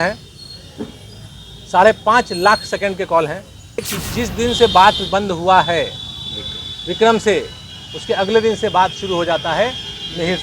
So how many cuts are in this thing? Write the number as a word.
one